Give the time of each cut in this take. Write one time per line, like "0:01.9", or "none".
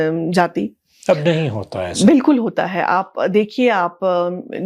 none